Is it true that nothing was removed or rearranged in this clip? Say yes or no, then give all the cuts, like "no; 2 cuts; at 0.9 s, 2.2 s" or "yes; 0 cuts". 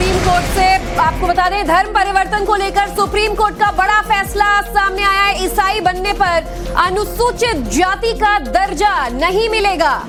yes; 0 cuts